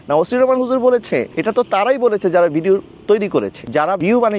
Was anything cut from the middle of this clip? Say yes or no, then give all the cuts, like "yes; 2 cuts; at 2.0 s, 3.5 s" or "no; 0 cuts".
no; 0 cuts